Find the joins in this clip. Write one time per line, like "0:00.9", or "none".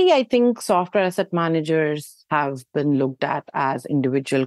none